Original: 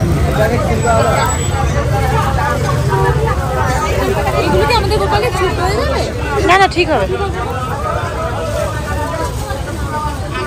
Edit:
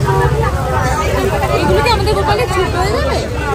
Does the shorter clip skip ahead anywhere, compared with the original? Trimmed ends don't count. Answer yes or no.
no